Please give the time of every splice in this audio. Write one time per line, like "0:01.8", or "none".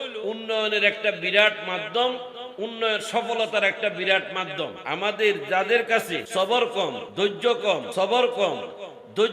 0:04.8
0:06.2
0:07.0
0:07.9